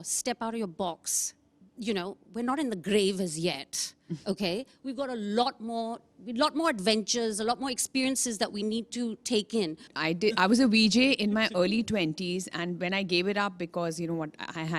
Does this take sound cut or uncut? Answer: cut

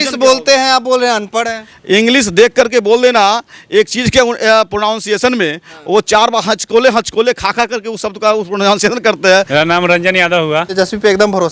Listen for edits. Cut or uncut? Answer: cut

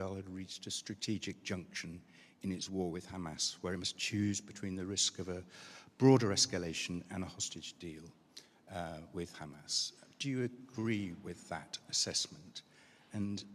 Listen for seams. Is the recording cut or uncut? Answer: uncut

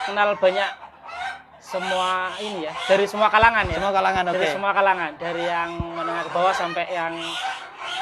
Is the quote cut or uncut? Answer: uncut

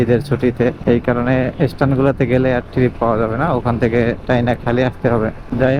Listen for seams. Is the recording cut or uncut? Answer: uncut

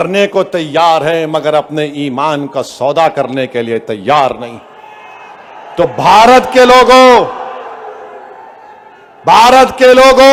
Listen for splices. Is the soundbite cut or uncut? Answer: uncut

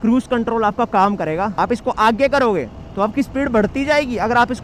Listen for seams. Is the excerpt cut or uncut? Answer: cut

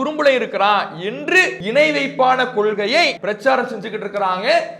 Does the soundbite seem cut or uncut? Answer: cut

